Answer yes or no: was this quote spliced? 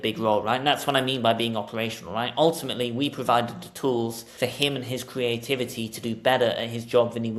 yes